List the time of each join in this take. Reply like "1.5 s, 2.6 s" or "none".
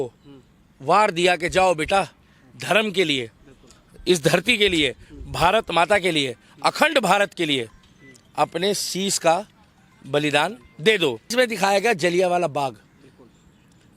11.3 s